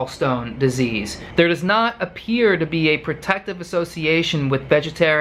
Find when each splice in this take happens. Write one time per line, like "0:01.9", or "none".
0:01.2